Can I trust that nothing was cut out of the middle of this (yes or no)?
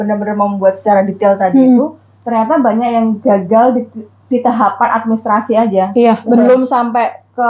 yes